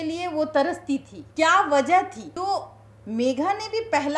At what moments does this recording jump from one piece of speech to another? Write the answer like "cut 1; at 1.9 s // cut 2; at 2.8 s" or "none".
cut 1; at 1.2 s // cut 2; at 2.2 s